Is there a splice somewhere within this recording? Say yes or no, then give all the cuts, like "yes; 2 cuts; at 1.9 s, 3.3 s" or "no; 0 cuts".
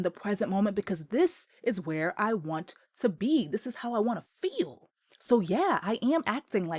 no; 0 cuts